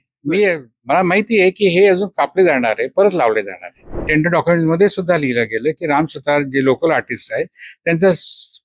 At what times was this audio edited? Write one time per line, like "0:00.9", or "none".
0:04.0

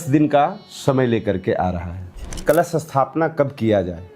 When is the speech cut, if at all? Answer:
0:02.4

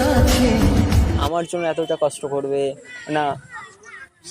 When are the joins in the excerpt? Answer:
0:01.2

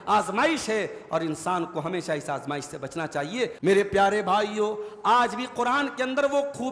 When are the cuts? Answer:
0:03.6

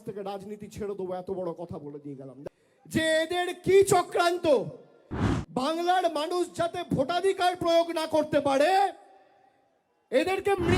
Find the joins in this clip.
0:02.3

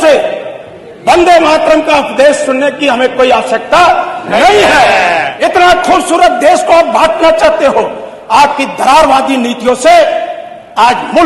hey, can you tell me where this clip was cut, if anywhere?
0:05.3

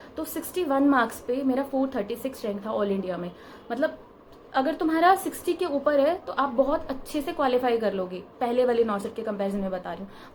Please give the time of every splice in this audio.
none

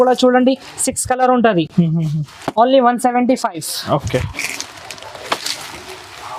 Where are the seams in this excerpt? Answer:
none

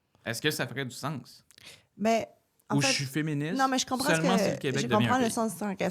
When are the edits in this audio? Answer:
none

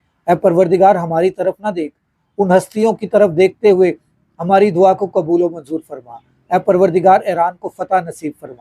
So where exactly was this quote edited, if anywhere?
none

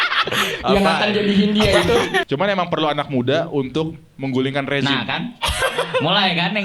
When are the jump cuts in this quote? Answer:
0:02.3

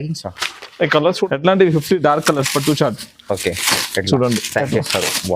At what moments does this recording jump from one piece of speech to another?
0:01.3

